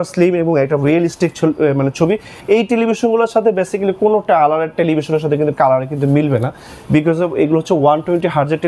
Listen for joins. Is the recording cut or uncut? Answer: uncut